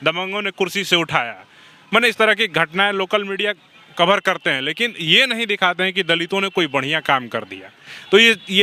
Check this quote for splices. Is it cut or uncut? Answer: uncut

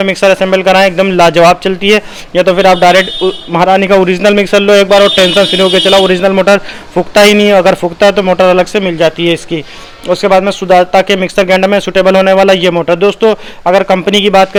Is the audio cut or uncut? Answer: uncut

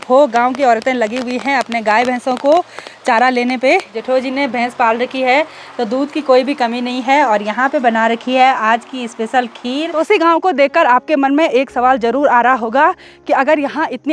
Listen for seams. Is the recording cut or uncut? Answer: cut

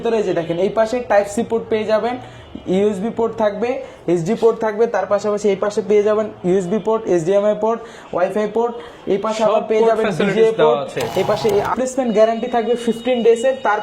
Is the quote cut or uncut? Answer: cut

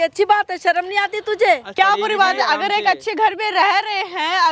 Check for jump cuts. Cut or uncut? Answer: cut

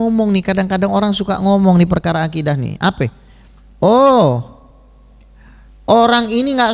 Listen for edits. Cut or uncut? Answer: uncut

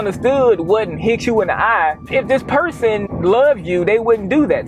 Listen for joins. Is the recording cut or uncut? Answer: cut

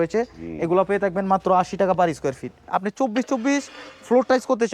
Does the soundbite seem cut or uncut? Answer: cut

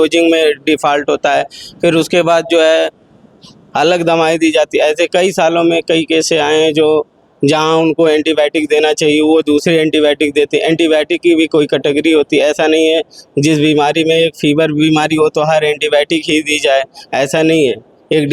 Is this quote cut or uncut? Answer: uncut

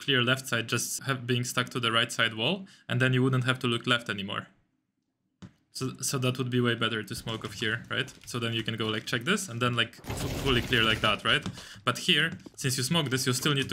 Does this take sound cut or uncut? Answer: cut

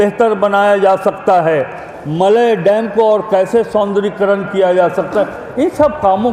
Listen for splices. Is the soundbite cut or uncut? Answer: uncut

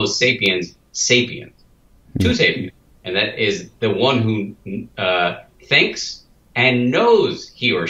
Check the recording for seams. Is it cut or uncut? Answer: uncut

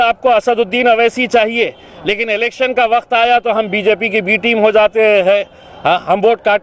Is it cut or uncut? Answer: uncut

